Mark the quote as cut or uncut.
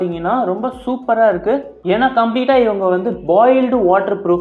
cut